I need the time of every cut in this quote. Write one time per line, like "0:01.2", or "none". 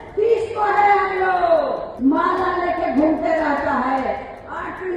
0:01.9